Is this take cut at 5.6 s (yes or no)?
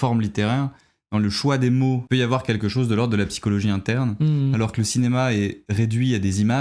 no